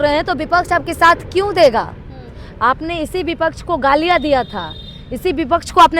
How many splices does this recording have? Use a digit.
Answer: 0